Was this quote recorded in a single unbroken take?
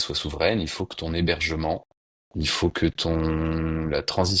yes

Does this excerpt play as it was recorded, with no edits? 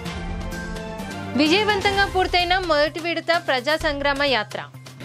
no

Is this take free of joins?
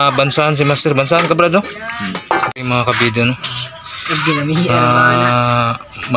no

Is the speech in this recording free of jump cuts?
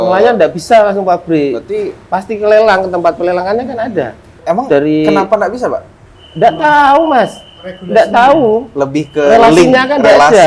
no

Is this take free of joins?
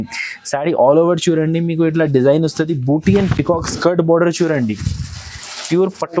yes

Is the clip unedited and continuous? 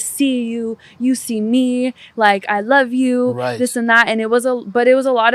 yes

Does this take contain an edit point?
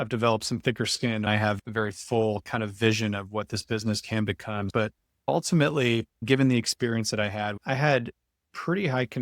yes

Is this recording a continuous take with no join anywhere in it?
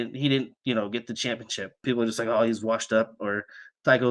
no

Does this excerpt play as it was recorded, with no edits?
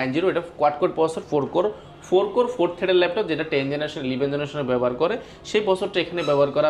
yes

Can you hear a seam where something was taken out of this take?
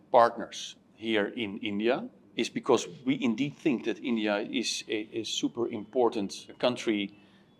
yes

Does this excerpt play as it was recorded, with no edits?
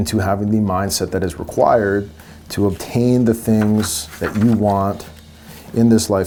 yes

